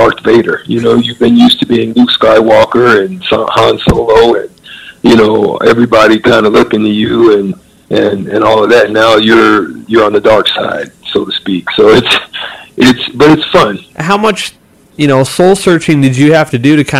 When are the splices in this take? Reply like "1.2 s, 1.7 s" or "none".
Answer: none